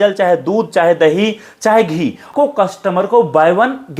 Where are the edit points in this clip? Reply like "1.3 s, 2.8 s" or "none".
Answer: 2.3 s